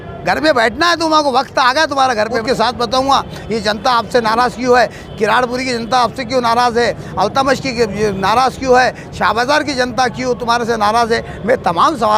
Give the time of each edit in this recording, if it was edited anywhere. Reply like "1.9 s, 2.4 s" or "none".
2.4 s